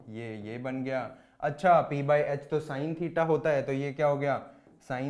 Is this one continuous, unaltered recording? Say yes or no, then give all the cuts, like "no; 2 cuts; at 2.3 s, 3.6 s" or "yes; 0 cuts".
yes; 0 cuts